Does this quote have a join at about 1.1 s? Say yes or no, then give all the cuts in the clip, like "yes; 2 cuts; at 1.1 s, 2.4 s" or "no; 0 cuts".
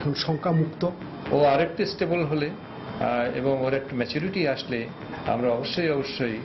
yes; 1 cut; at 1.1 s